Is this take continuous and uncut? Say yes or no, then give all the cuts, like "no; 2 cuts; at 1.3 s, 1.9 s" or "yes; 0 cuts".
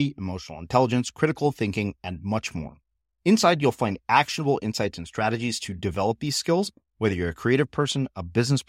yes; 0 cuts